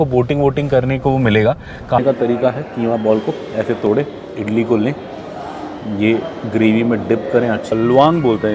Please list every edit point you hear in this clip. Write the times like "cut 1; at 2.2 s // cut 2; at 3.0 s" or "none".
cut 1; at 2.0 s // cut 2; at 7.7 s